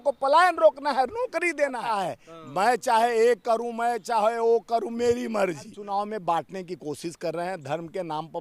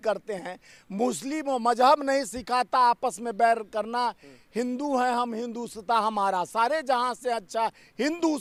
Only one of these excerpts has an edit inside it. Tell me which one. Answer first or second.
first